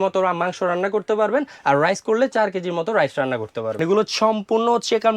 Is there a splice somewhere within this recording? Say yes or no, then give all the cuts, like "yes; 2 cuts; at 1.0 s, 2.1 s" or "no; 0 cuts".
yes; 1 cut; at 3.8 s